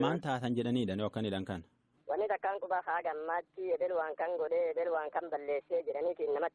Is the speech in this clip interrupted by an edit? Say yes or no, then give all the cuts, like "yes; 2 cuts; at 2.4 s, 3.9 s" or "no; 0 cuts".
yes; 1 cut; at 2.0 s